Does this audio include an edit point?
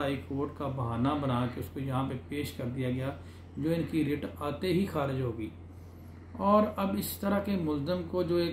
no; 0 cuts

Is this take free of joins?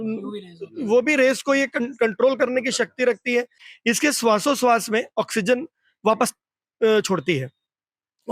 no; 1 cut; at 3.6 s

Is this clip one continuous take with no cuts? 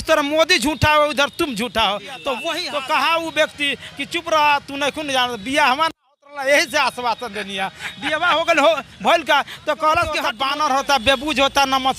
no; 2 cuts; at 2.6 s, 10.3 s

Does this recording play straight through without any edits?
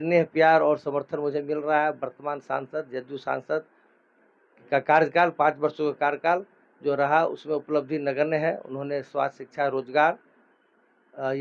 yes; 0 cuts

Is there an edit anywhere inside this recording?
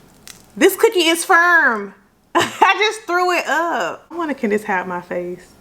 yes; 1 cut; at 4.1 s

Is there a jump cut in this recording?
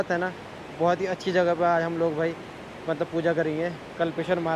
no; 0 cuts

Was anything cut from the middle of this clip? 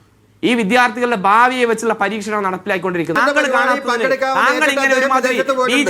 yes; 1 cut; at 3.2 s

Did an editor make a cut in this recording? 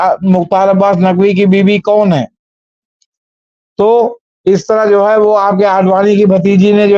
no; 0 cuts

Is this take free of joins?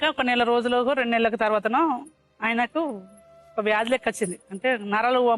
yes; 0 cuts

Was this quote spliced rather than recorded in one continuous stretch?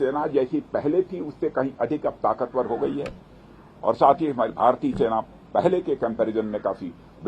no; 0 cuts

